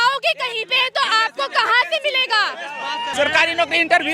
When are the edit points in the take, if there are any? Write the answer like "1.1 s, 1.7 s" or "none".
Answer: 3.1 s